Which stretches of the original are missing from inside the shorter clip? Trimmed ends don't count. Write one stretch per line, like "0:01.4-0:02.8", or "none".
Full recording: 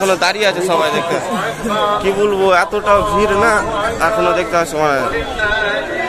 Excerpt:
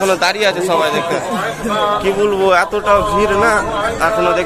none